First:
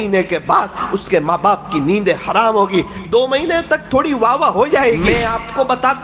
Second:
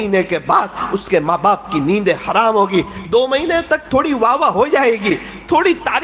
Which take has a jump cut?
first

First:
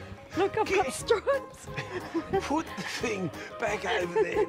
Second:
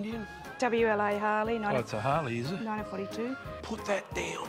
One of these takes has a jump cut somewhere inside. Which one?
second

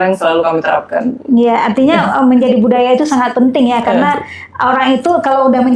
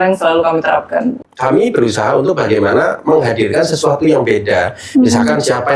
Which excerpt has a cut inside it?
second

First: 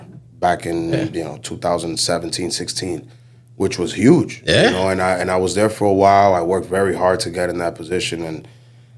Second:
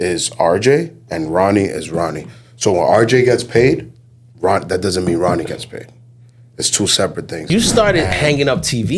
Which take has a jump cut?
second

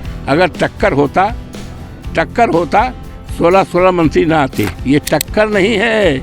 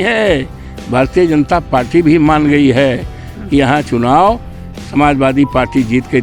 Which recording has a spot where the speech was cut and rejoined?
first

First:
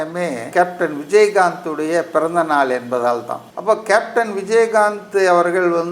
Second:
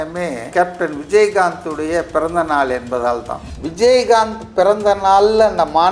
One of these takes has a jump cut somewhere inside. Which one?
second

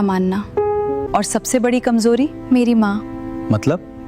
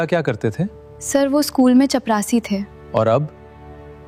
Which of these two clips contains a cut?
first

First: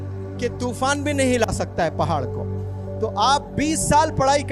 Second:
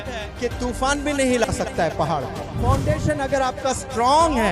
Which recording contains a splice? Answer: second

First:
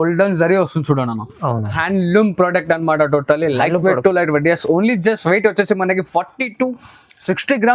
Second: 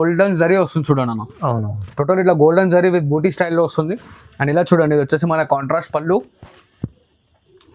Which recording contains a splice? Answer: first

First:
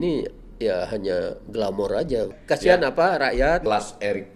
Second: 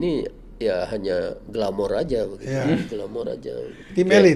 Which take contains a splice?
first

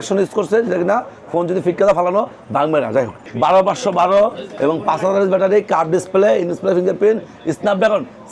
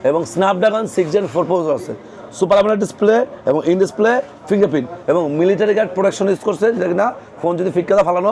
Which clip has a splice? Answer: first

